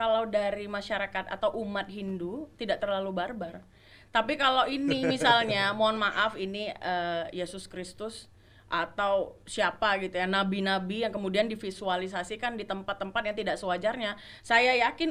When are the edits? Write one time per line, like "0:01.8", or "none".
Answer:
none